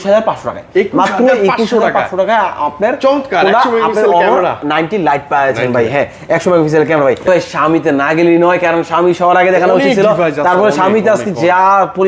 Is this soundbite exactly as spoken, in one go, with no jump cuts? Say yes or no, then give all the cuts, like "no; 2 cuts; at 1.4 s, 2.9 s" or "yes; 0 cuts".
yes; 0 cuts